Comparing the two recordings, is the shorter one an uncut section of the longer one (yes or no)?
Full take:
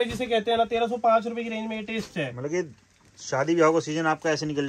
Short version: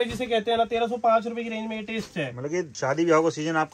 no